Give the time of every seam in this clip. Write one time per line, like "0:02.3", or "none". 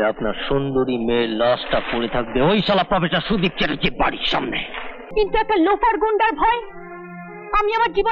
0:05.1